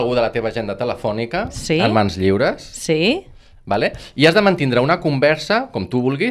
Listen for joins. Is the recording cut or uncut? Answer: uncut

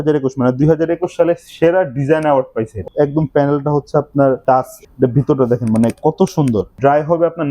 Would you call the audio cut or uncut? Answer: cut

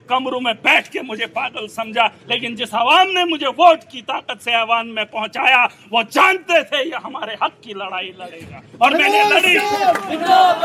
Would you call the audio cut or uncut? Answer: uncut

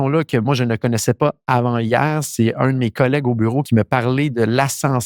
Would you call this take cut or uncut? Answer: cut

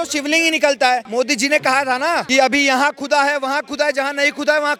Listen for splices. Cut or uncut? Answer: uncut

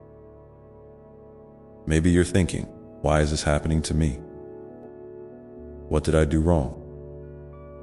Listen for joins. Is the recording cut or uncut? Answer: cut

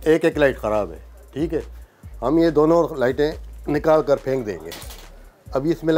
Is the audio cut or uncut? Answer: uncut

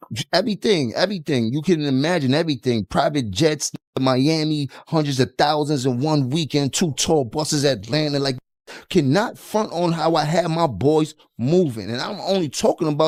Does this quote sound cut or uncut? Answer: uncut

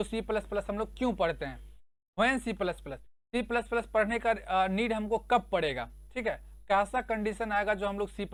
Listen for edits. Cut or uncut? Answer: uncut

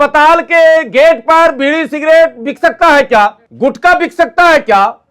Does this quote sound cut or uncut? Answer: cut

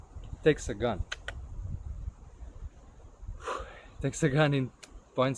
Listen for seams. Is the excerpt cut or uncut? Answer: uncut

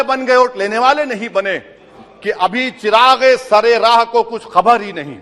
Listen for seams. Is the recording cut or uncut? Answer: cut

